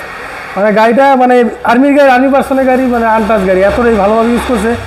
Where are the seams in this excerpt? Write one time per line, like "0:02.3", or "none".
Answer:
none

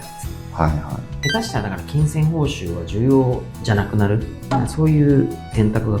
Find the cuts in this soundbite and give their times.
0:01.1
0:04.3

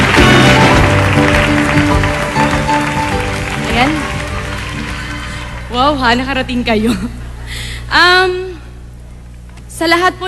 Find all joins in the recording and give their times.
0:01.0

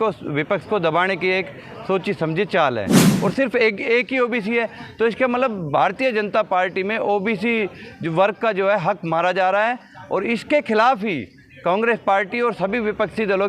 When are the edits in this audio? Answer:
0:03.0

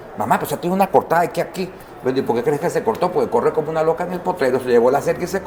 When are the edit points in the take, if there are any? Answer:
none

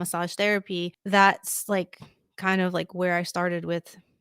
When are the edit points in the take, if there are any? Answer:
0:01.0

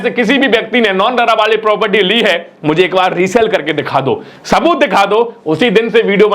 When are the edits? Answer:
none

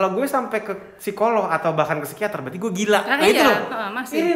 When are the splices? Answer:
none

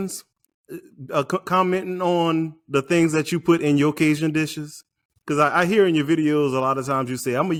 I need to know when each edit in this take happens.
none

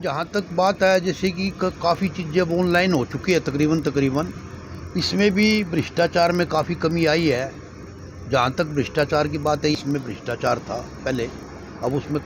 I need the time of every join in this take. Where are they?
0:09.7

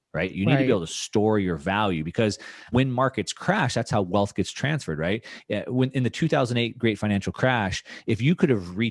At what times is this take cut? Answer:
0:02.7

